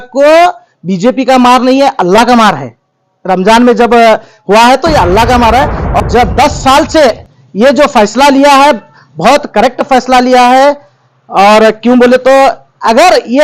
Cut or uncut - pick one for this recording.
cut